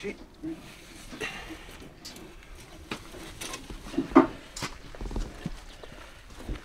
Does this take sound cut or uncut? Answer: uncut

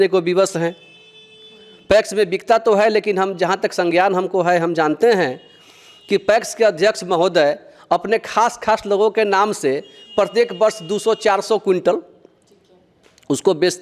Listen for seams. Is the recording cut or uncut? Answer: uncut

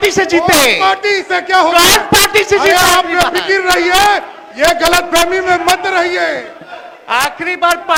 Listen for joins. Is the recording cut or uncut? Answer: uncut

